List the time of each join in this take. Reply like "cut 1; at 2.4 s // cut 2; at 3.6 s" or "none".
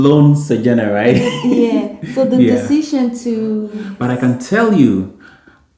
cut 1; at 3.9 s